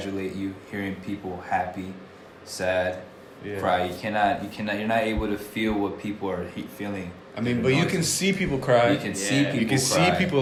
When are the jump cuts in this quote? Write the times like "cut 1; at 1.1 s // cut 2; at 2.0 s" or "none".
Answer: none